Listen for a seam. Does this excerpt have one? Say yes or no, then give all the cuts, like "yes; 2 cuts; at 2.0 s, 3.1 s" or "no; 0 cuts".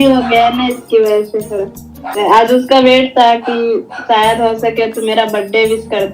yes; 1 cut; at 2.1 s